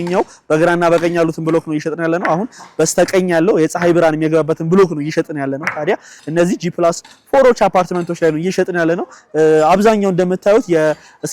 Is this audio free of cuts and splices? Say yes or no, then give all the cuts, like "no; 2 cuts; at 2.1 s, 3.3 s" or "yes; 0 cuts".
no; 1 cut; at 6.1 s